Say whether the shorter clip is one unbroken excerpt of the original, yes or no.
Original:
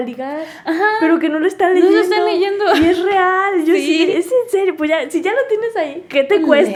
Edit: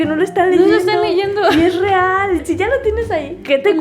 no